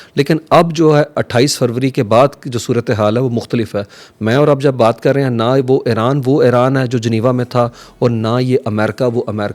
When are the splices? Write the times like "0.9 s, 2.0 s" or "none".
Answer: none